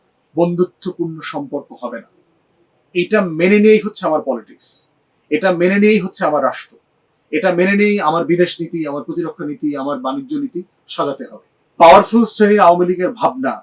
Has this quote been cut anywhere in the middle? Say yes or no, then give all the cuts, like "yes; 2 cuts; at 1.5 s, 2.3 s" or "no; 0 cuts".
yes; 1 cut; at 11.7 s